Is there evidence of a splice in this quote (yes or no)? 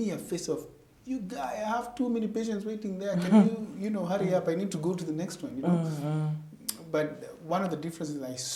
no